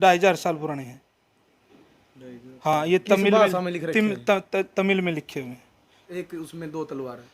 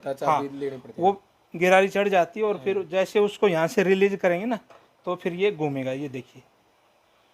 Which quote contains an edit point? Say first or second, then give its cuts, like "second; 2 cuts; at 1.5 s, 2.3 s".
first; 1 cut; at 6.1 s